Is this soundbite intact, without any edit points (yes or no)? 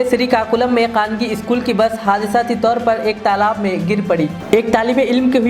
yes